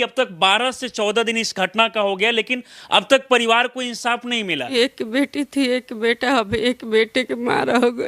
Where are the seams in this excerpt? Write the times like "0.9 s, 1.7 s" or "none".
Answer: 4.6 s